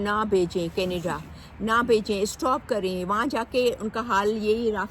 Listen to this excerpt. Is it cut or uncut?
uncut